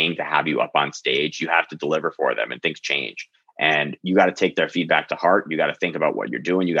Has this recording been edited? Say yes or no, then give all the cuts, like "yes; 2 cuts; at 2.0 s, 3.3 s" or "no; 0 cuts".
no; 0 cuts